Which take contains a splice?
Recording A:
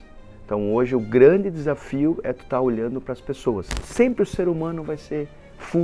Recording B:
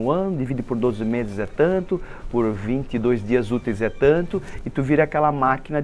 A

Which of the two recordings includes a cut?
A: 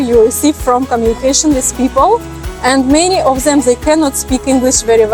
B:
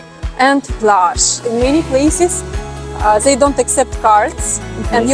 B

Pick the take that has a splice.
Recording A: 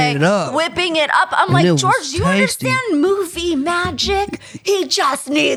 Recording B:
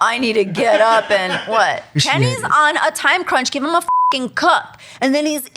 B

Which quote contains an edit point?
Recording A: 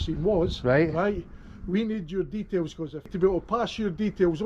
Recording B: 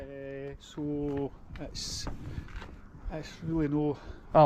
A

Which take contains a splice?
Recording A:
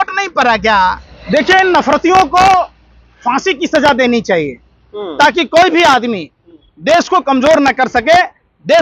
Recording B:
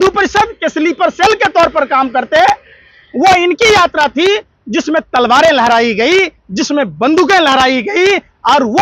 A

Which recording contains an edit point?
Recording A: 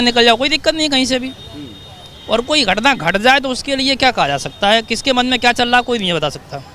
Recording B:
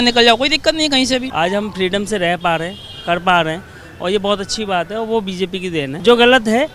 B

